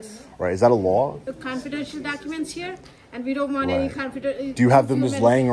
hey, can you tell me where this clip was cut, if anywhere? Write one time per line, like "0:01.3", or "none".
0:01.2